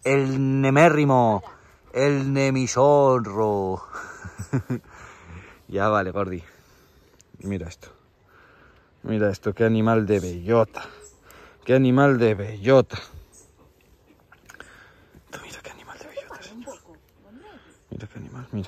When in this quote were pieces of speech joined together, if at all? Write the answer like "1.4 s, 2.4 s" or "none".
none